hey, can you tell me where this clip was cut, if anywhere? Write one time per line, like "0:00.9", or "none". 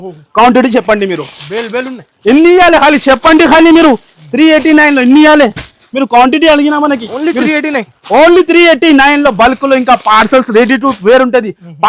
none